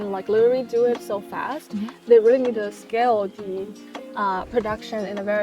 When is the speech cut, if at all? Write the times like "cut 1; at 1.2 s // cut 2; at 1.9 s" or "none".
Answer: cut 1; at 2.0 s